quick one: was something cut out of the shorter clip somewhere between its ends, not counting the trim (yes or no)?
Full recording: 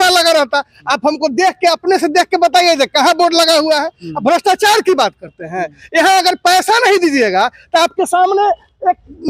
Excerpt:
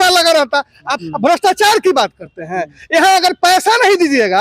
yes